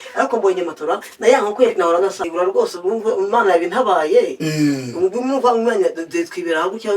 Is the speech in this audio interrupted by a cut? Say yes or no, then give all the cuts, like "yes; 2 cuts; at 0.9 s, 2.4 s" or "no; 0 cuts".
yes; 1 cut; at 2.3 s